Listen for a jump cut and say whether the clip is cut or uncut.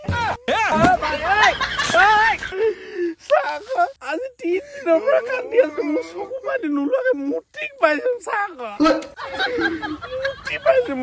cut